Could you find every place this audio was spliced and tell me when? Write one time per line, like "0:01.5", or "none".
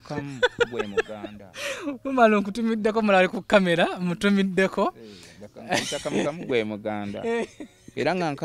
none